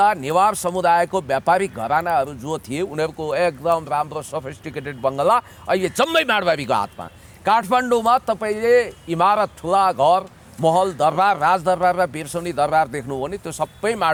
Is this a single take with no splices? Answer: yes; 0 cuts

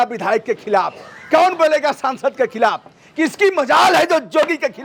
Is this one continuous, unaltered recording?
yes; 0 cuts

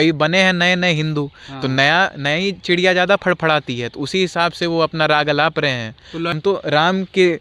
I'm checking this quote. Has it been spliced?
yes; 1 cut; at 6.3 s

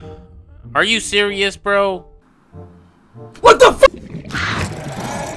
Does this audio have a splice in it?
yes; 1 cut; at 3.9 s

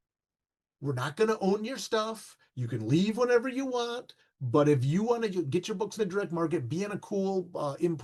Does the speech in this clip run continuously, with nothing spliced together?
yes; 0 cuts

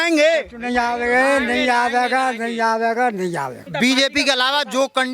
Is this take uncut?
no; 1 cut; at 3.6 s

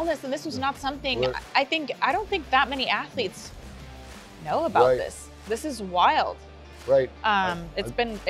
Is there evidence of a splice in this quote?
no; 0 cuts

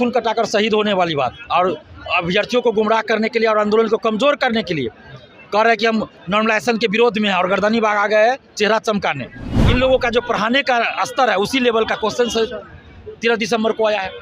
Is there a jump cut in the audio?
yes; 1 cut; at 9.5 s

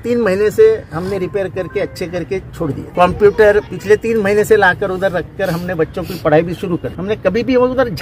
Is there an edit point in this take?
yes; 3 cuts; at 2.8 s, 3.7 s, 6.9 s

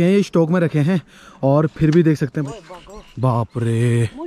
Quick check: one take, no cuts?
no; 1 cut; at 2.4 s

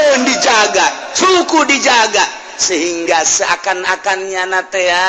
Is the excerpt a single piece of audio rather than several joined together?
yes; 0 cuts

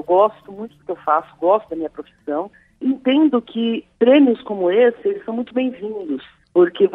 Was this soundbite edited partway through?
no; 0 cuts

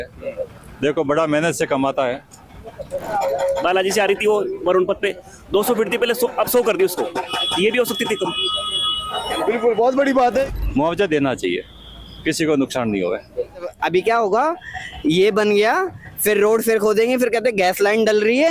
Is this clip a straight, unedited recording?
no; 3 cuts; at 3.0 s, 10.5 s, 13.7 s

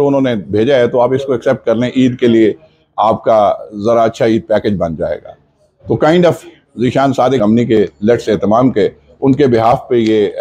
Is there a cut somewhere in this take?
yes; 1 cut; at 7.4 s

